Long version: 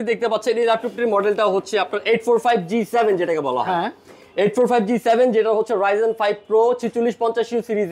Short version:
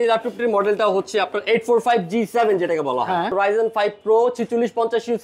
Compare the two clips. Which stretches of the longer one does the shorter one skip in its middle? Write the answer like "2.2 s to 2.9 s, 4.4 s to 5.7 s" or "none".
3.9 s to 5.8 s